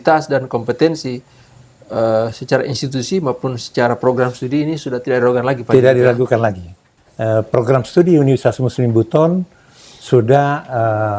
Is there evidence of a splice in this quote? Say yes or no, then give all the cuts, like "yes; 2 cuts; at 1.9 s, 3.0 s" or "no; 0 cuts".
yes; 1 cut; at 6.8 s